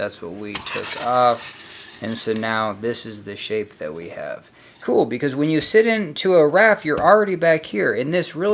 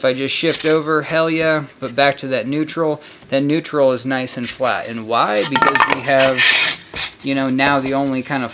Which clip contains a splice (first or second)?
first